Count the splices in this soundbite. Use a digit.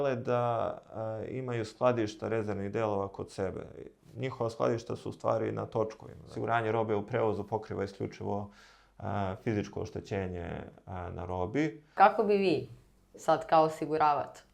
2